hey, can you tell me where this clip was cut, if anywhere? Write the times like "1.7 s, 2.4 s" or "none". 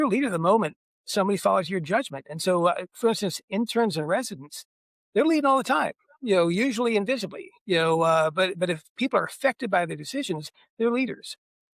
none